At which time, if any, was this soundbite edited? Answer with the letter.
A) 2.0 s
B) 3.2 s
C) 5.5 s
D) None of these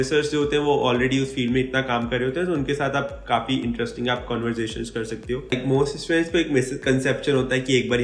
C